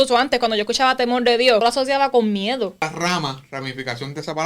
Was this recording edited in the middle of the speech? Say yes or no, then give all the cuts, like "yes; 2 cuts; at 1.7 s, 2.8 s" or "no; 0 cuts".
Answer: yes; 2 cuts; at 1.6 s, 2.8 s